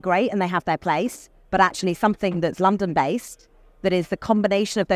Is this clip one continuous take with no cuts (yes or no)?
yes